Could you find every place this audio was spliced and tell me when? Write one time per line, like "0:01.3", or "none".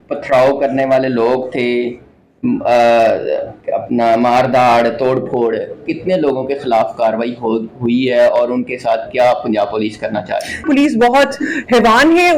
0:10.6